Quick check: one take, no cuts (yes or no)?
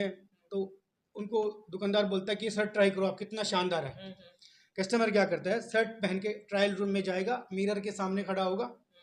yes